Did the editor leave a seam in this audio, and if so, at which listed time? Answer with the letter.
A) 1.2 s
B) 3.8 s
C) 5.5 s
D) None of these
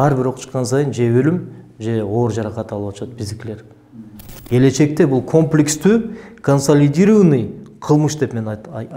B